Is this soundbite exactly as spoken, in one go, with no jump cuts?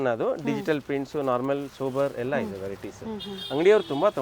yes; 0 cuts

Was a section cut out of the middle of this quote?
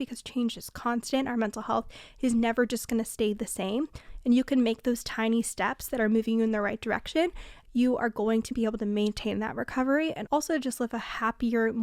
yes; 2 cuts; at 7.5 s, 8.5 s

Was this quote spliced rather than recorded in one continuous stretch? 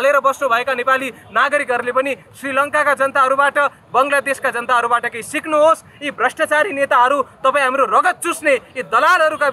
no; 0 cuts

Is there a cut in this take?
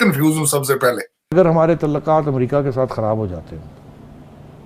yes; 1 cut; at 1.1 s

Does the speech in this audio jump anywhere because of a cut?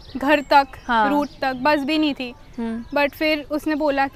no; 0 cuts

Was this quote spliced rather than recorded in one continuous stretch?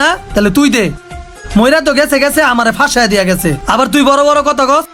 no; 0 cuts

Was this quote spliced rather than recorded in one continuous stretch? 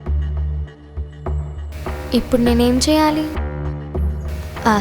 yes; 2 cuts; at 2.0 s, 3.3 s

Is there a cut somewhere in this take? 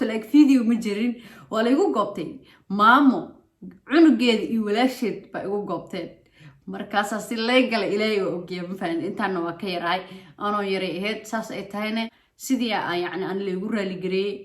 yes; 1 cut; at 12.3 s

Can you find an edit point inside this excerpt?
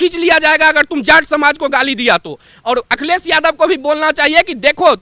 no; 0 cuts

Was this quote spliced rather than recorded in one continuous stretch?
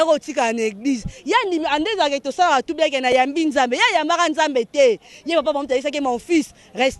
no; 0 cuts

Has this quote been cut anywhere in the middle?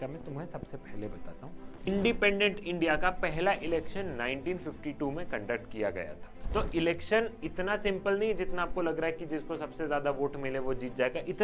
yes; 2 cuts; at 1.9 s, 6.3 s

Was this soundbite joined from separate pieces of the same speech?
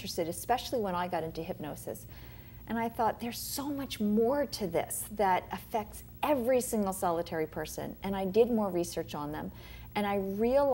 no; 0 cuts

